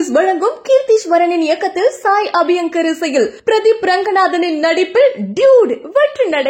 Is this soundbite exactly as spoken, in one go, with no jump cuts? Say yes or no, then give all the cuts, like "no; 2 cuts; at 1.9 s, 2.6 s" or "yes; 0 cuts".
yes; 0 cuts